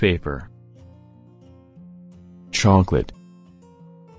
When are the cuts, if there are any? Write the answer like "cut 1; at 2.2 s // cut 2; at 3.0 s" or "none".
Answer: none

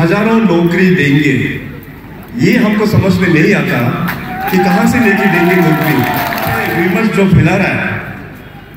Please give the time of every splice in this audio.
cut 1; at 6.6 s

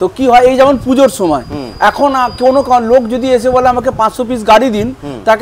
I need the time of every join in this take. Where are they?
none

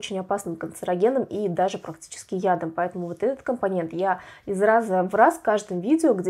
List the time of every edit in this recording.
none

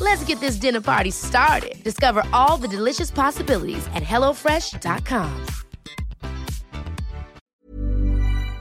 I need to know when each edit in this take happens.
cut 1; at 7.4 s

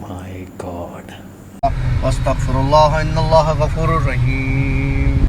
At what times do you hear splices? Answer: cut 1; at 1.6 s

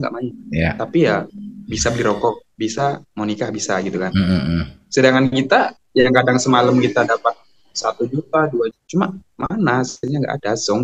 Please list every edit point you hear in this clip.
none

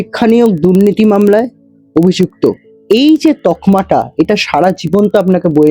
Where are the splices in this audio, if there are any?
none

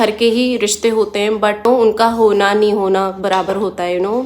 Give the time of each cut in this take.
cut 1; at 1.7 s

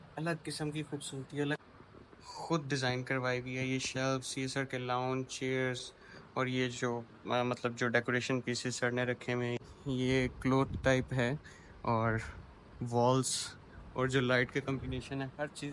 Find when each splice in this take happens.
cut 1; at 1.7 s // cut 2; at 9.7 s

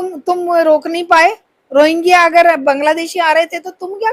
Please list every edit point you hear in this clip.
none

